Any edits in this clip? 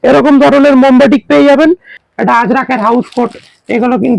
yes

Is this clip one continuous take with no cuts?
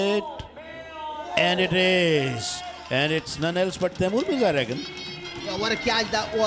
yes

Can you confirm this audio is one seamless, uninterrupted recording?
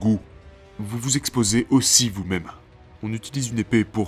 no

